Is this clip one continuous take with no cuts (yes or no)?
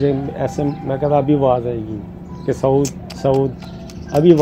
yes